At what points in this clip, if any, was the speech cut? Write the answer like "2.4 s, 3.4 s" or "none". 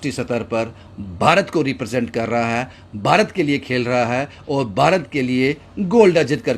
none